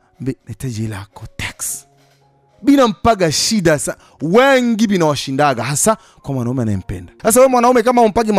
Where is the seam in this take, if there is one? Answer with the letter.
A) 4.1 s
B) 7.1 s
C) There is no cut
B